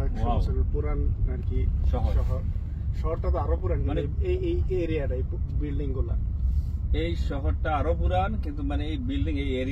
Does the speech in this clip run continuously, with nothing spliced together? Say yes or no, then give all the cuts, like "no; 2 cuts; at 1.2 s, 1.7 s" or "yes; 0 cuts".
yes; 0 cuts